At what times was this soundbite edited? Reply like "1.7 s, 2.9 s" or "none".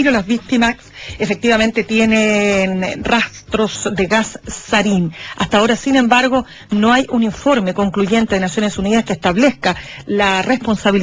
4.5 s